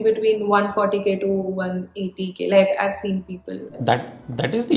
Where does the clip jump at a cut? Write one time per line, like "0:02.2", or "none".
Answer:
0:03.7